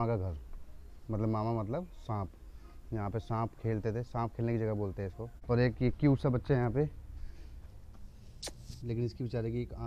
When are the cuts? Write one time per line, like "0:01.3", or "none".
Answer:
0:05.3

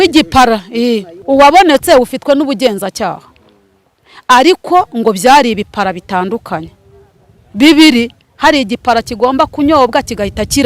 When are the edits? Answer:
0:01.1

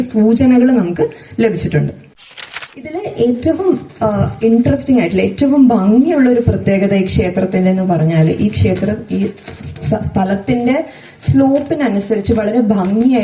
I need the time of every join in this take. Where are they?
0:02.2

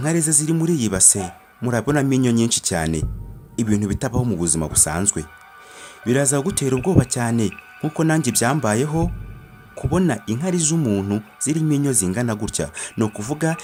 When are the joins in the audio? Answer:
none

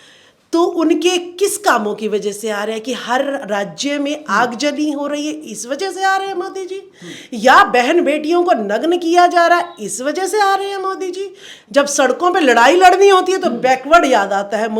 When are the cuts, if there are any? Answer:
0:11.5

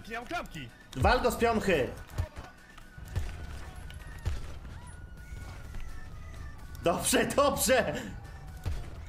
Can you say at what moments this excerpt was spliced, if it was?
0:04.0

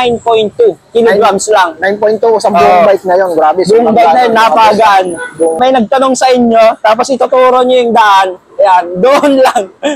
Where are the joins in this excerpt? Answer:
0:05.6

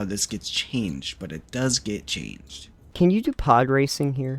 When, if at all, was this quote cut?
0:02.9

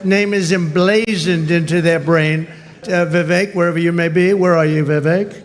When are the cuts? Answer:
0:02.8

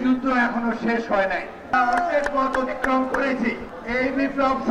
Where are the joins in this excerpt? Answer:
0:01.7
0:03.7

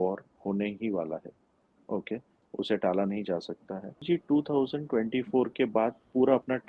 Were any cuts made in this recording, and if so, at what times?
0:04.0

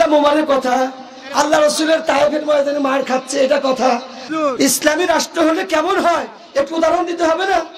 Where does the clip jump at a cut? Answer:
0:04.2

